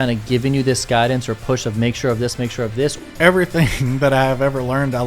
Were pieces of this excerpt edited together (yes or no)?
yes